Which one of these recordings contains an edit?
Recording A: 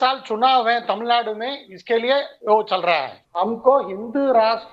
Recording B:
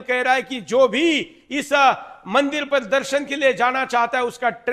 A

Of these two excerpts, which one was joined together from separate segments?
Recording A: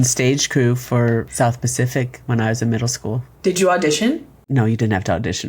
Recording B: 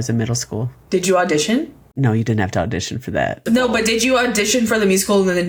A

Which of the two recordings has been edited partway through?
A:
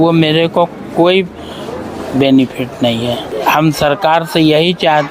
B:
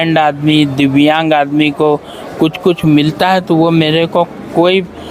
A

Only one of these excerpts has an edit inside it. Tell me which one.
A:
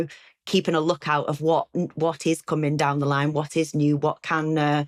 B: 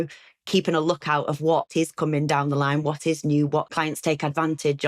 B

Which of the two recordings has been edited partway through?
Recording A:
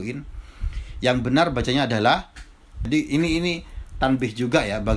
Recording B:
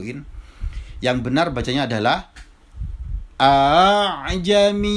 A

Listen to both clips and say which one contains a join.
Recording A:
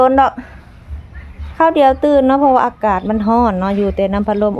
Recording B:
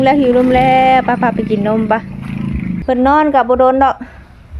B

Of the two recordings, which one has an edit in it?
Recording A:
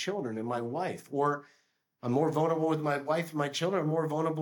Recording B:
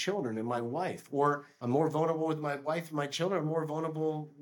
B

